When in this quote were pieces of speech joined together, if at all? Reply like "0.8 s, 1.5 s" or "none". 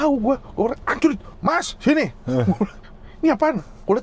1.3 s